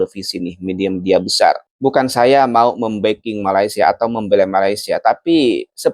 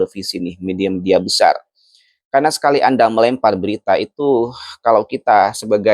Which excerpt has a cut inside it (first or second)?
first